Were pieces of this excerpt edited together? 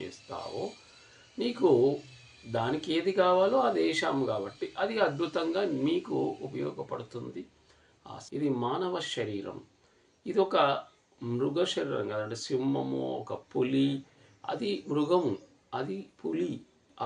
yes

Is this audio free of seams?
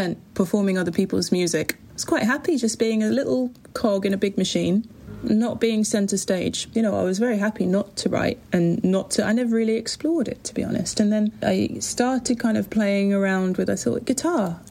no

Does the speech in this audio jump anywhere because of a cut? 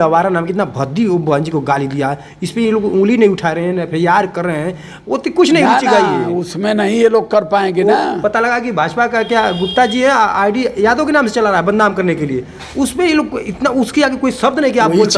no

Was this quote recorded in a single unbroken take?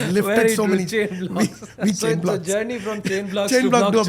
no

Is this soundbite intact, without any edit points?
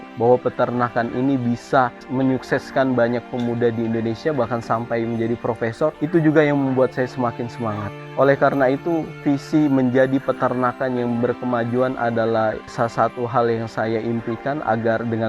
yes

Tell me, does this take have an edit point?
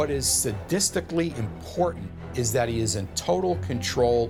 no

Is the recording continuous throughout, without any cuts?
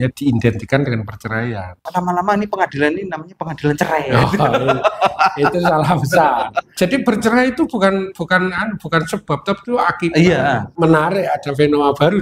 no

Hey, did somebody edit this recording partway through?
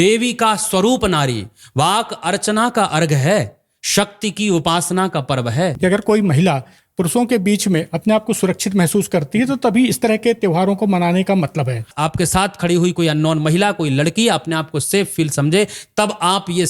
yes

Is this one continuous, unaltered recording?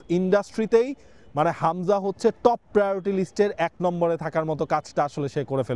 yes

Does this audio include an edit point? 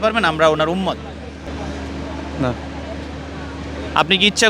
yes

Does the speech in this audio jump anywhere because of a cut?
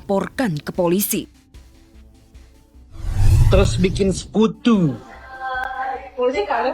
yes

